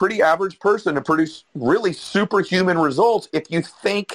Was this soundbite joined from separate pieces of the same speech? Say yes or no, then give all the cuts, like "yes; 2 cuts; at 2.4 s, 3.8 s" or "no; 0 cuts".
no; 0 cuts